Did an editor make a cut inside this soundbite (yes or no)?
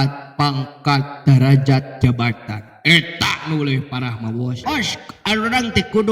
yes